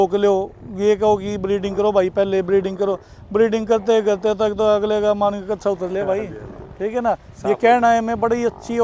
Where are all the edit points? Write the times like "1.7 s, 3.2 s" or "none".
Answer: none